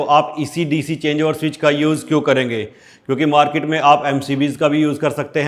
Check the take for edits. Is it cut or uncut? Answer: uncut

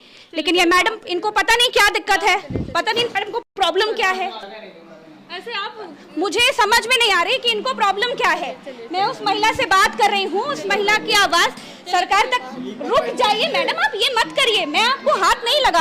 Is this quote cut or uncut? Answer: uncut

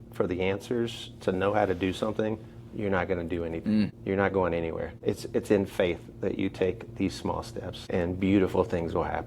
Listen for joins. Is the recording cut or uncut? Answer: cut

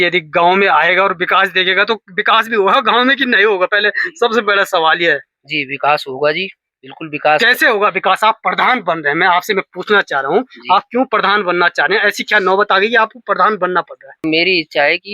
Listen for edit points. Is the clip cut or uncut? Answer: cut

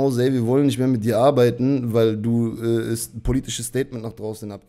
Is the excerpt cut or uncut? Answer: uncut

